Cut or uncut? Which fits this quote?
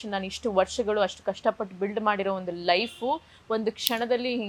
uncut